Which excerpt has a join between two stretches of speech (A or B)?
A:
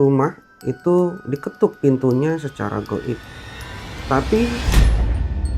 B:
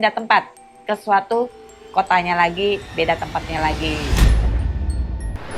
A